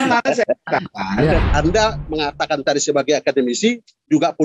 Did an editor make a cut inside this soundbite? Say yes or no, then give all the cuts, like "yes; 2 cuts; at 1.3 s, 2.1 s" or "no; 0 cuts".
yes; 1 cut; at 1.5 s